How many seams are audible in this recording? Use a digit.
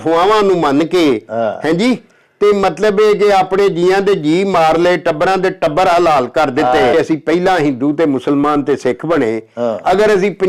1